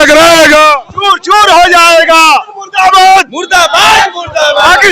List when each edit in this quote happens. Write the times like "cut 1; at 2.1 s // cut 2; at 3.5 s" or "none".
cut 1; at 2.6 s